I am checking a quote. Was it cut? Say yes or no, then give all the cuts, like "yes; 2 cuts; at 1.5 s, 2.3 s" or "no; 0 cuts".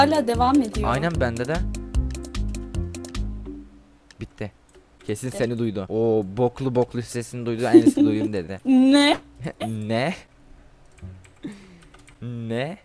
no; 0 cuts